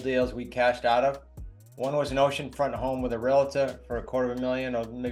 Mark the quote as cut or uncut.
uncut